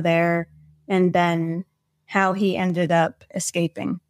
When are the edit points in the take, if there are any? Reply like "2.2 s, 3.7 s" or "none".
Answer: none